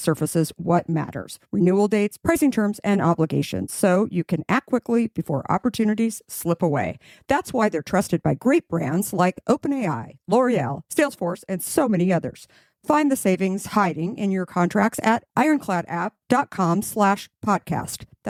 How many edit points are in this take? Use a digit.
0